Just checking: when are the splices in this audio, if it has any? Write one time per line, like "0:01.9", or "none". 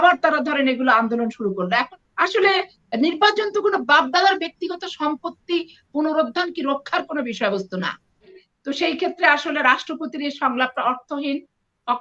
0:01.7
0:08.3